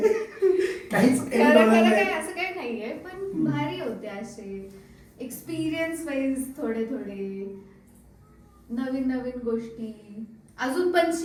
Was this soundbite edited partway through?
no; 0 cuts

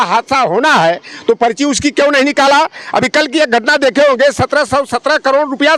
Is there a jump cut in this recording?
no; 0 cuts

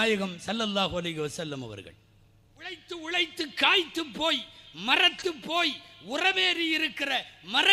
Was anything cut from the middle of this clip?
yes; 1 cut; at 2.8 s

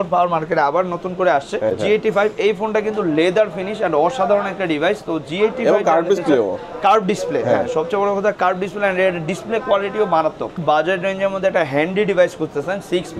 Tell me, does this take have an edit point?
yes; 2 cuts; at 1.7 s, 10.6 s

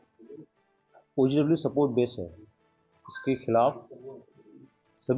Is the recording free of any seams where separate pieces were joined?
yes; 0 cuts

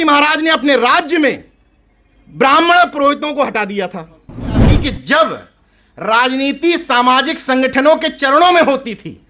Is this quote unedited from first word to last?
no; 1 cut; at 4.7 s

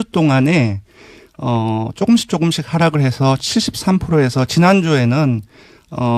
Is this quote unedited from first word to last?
yes; 0 cuts

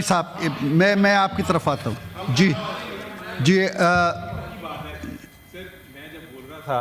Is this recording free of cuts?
yes; 0 cuts

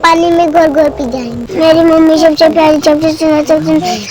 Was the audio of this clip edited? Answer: yes; 1 cut; at 1.5 s

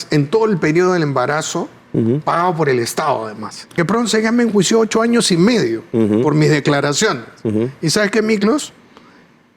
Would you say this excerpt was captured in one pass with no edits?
no; 1 cut; at 3.7 s

